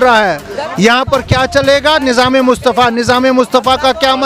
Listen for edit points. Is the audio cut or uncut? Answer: uncut